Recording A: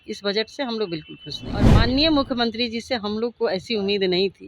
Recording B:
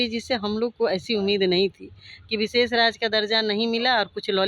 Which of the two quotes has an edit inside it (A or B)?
A